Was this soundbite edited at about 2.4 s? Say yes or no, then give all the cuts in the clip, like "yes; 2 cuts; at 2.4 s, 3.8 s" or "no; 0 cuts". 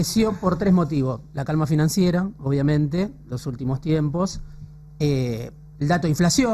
no; 0 cuts